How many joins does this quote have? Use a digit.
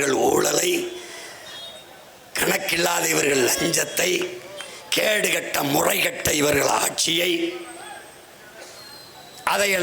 0